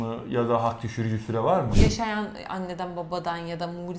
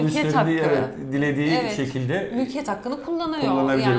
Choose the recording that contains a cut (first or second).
first